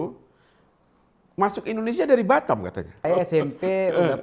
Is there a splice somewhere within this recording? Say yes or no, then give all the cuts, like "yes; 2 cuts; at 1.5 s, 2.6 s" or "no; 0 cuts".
yes; 1 cut; at 3.0 s